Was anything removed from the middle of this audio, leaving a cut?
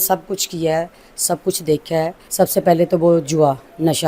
yes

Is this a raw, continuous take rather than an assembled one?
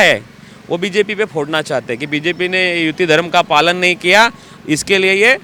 yes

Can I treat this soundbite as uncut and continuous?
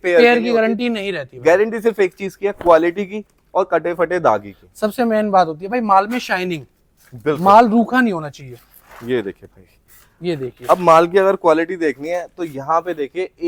yes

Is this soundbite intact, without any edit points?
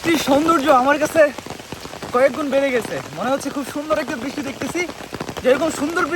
yes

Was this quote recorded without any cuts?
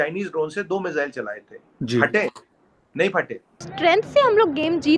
no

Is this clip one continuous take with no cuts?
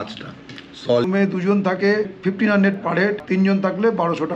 no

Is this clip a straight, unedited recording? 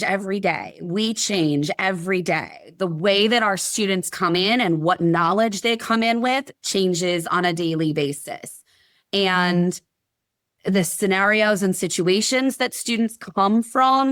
yes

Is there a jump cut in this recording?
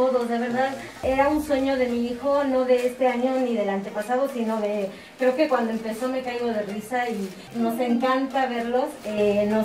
yes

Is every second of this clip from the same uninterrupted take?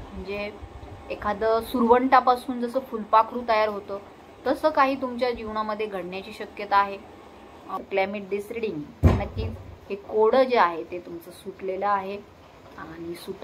no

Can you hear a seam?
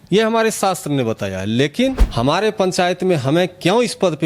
yes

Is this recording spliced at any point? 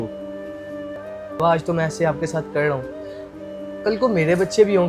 yes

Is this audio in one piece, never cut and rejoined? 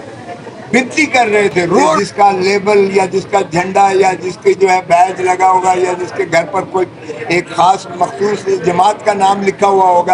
no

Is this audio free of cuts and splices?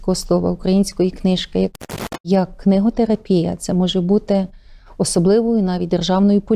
no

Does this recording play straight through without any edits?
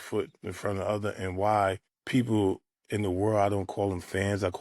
no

